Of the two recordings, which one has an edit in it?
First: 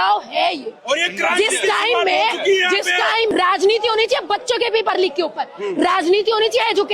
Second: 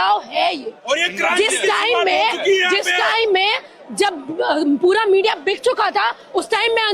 first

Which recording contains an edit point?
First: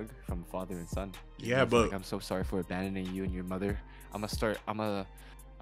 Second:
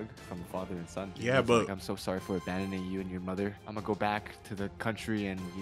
second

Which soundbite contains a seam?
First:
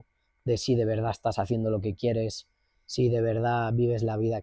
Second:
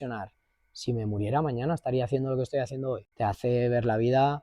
second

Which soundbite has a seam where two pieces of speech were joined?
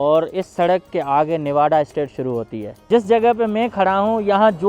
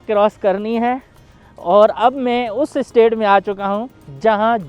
first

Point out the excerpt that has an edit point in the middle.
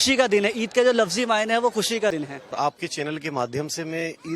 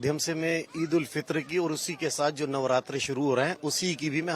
first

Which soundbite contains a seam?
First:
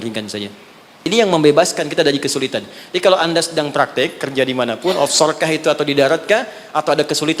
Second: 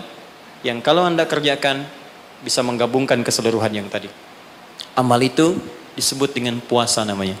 first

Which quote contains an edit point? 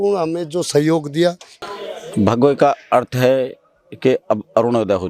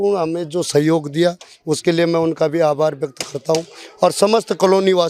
first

